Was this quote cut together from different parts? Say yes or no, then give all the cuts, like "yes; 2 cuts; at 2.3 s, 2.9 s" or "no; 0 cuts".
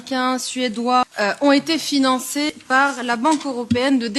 yes; 2 cuts; at 1.1 s, 2.6 s